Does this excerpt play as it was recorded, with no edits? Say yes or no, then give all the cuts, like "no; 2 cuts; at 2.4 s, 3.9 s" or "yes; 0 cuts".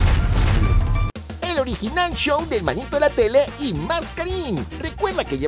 no; 1 cut; at 1.0 s